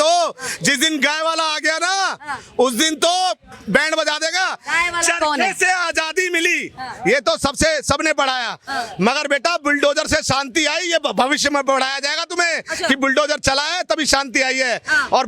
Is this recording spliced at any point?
no; 0 cuts

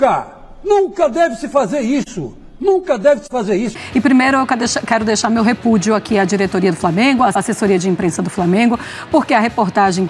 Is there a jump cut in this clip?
yes; 1 cut; at 3.7 s

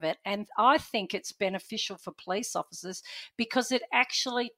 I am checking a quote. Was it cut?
no; 0 cuts

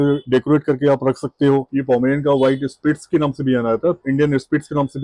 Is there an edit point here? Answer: yes; 2 cuts; at 1.7 s, 4.0 s

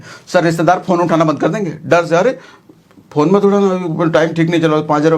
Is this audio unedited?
yes; 0 cuts

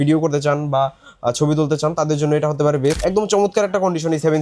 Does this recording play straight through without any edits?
no; 1 cut; at 3.0 s

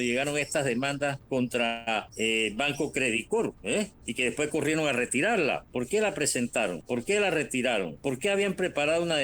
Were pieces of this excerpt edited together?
yes; 6 cuts; at 1.2 s, 2.1 s, 3.6 s, 5.6 s, 6.8 s, 7.9 s

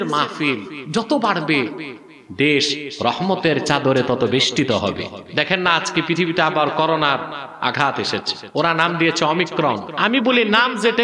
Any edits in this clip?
yes; 3 cuts; at 5.1 s, 8.4 s, 9.9 s

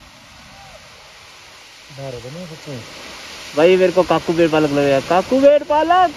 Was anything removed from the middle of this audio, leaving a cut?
no; 0 cuts

